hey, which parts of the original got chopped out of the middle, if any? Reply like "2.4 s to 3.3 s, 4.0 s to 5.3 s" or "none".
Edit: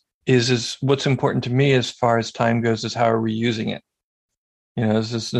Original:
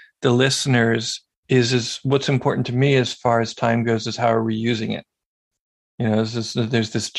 none